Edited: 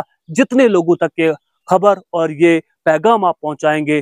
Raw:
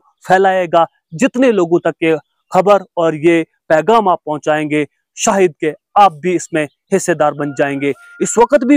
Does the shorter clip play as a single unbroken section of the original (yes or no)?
yes